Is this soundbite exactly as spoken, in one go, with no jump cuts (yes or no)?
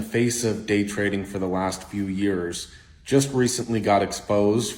yes